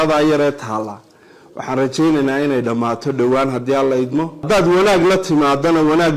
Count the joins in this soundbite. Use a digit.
1